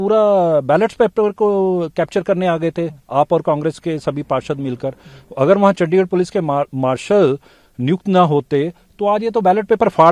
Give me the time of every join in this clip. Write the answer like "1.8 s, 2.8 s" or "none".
none